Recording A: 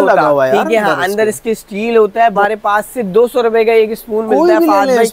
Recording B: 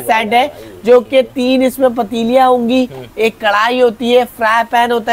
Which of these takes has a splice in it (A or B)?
A